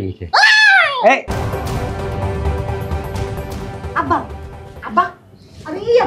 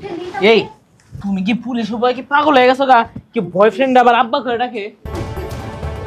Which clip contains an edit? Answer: first; 1 cut; at 1.3 s

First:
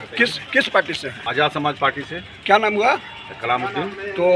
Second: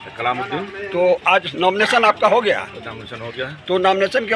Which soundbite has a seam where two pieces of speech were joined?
first; 1 cut; at 1.1 s

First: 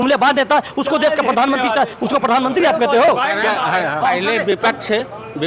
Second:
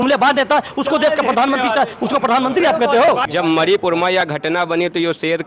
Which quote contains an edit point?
second; 1 cut; at 3.3 s

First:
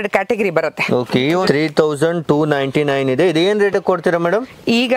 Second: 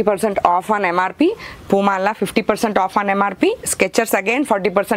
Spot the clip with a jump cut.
first; 1 cut; at 1.4 s

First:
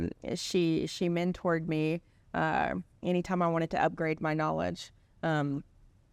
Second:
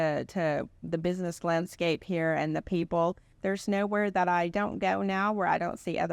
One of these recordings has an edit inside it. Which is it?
second; 1 cut; at 3.3 s

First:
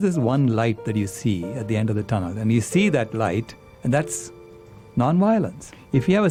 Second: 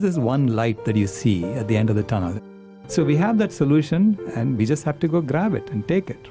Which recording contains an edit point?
second; 1 cut; at 2.4 s

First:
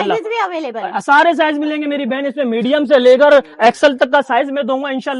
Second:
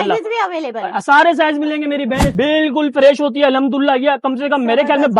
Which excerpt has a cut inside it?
second; 1 cut; at 2.3 s

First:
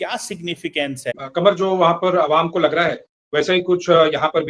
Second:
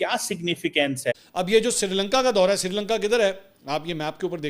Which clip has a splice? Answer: second; 1 cut; at 1.2 s

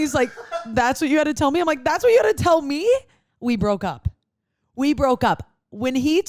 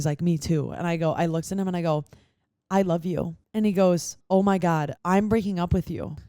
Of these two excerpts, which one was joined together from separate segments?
second; 3 cuts; at 3.4 s, 4.1 s, 4.9 s

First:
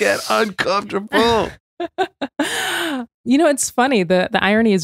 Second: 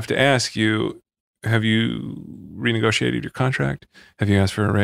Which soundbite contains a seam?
first; 2 cuts; at 1.6 s, 3.1 s

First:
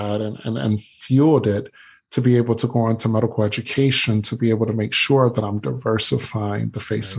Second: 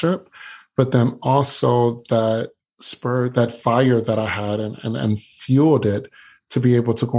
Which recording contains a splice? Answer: second; 1 cut; at 3.1 s

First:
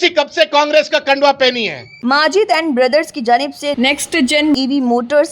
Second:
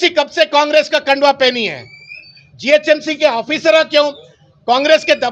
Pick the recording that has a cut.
first; 1 cut; at 2.0 s

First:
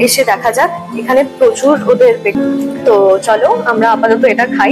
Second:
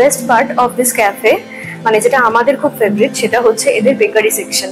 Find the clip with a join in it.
first; 1 cut; at 2.3 s

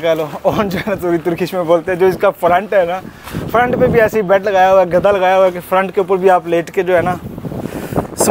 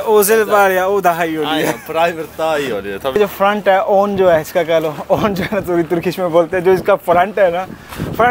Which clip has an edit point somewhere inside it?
second; 1 cut; at 3.2 s

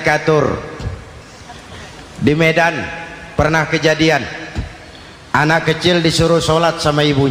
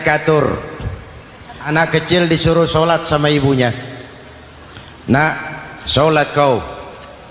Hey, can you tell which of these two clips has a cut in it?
second; 1 cut; at 1.7 s

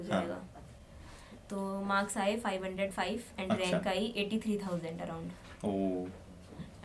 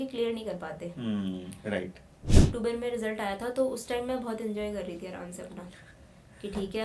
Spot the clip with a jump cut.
second; 1 cut; at 2.4 s

